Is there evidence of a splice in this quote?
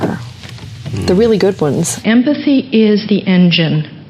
yes; 1 cut; at 2.0 s

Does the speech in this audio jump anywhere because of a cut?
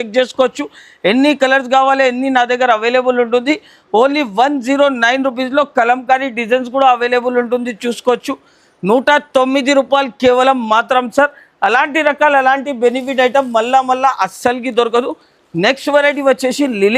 no; 0 cuts

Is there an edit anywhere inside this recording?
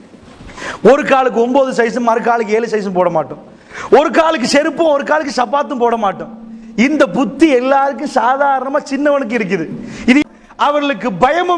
yes; 2 cuts; at 4.8 s, 10.2 s

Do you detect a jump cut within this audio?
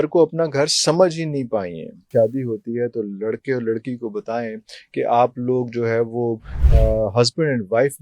yes; 1 cut; at 2.1 s

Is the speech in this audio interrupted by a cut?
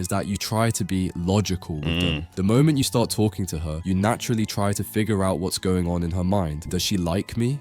yes; 1 cut; at 2.3 s

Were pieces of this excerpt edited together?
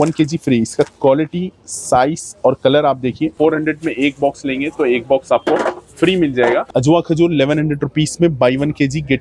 yes; 2 cuts; at 3.3 s, 6.7 s

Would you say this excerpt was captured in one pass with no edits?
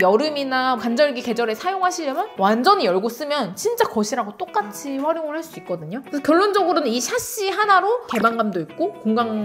yes; 0 cuts

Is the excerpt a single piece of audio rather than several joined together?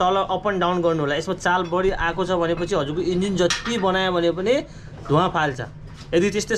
yes; 0 cuts

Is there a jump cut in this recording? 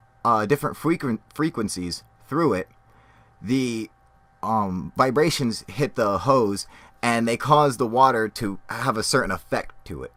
no; 0 cuts

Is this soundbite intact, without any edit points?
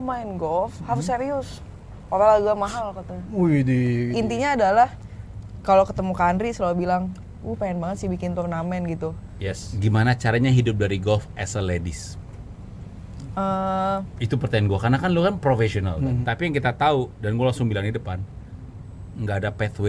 no; 3 cuts; at 4.1 s, 9.7 s, 16.2 s

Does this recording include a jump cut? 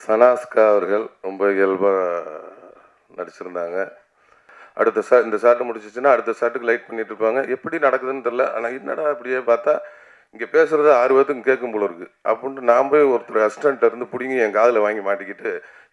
yes; 1 cut; at 4.6 s

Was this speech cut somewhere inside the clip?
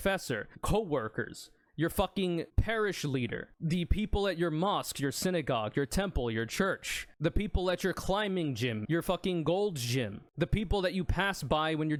no; 0 cuts

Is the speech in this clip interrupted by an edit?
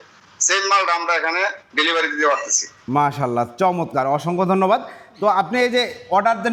no; 0 cuts

